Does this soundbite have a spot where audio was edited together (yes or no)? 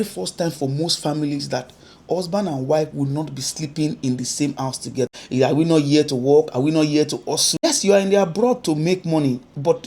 yes